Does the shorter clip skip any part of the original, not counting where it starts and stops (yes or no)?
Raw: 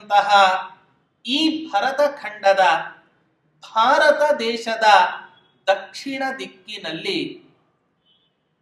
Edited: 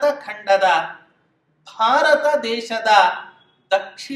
no